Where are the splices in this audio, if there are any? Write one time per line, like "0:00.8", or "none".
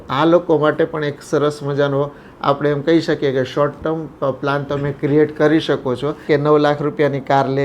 0:06.2